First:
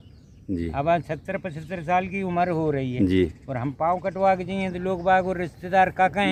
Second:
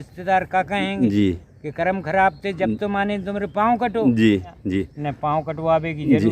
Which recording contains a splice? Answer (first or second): second